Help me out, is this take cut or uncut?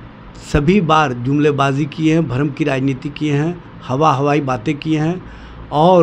uncut